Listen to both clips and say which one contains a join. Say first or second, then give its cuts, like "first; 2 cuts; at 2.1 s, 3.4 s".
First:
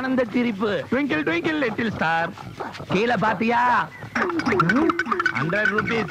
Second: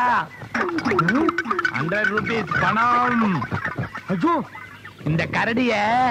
first; 1 cut; at 2.0 s